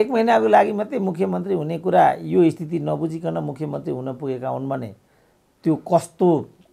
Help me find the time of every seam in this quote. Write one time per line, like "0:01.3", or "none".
none